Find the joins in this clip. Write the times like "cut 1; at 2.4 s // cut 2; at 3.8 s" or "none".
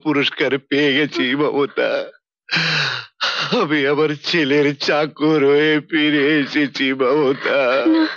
none